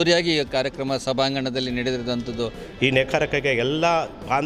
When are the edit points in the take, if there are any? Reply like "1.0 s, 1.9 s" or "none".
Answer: 2.6 s

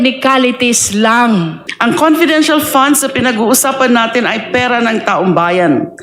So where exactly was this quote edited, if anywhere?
1.6 s

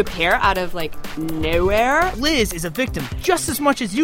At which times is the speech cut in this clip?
2.1 s

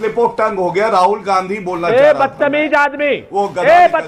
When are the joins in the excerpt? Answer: none

